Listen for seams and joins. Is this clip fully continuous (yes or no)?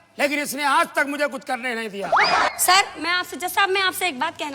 no